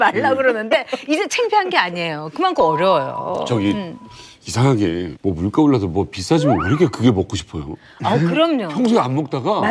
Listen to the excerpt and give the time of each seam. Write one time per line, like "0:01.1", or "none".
none